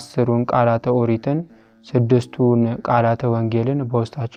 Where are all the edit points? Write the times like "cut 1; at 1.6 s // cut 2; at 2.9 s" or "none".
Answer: none